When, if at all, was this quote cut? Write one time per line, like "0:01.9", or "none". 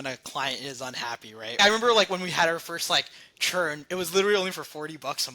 0:01.6